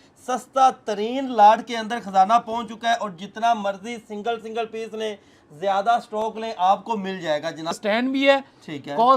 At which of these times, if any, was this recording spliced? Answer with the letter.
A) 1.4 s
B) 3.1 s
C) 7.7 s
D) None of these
C